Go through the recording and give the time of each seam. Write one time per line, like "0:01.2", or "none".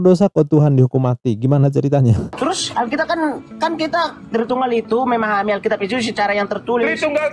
0:02.3